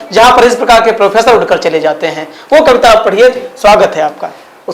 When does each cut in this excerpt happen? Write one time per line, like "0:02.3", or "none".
none